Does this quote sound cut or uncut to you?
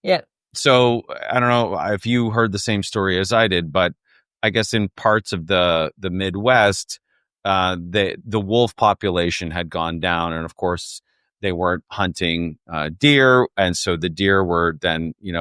uncut